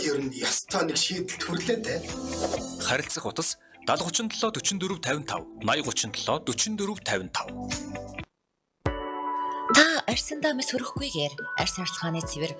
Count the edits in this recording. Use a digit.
1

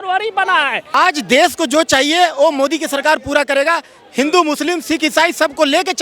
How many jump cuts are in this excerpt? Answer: 1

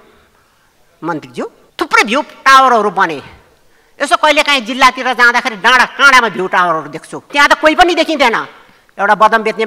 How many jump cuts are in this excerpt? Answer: 2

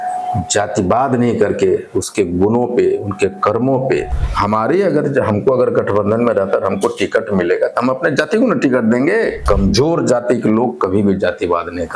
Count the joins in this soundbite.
2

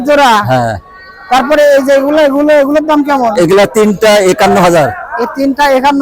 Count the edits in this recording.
0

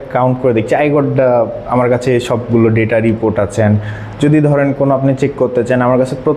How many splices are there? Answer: 0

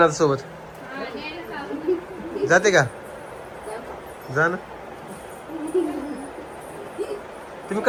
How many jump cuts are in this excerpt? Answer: 0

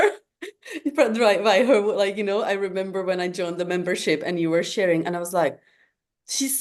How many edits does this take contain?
0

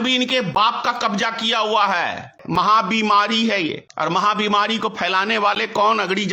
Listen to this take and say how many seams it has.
2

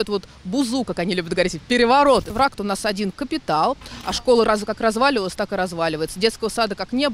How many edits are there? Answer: 2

